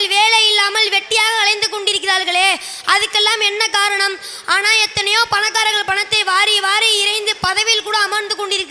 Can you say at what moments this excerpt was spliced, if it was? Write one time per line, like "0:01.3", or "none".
none